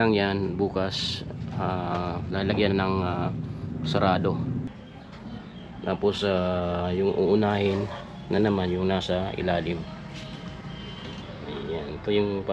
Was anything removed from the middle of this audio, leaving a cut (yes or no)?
yes